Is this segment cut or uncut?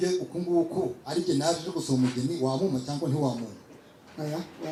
uncut